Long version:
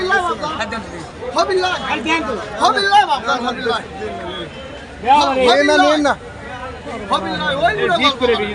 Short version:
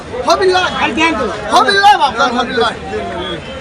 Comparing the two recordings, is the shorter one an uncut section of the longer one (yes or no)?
yes